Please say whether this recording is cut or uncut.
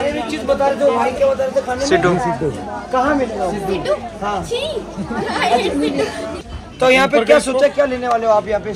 cut